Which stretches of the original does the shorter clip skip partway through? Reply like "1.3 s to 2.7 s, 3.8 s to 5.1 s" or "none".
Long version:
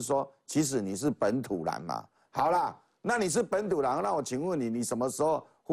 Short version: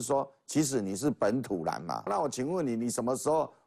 2.1 s to 4.0 s